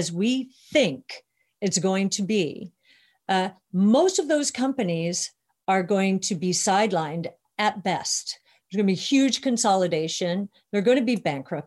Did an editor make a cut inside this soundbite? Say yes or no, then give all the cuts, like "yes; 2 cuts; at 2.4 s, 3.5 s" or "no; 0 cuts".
no; 0 cuts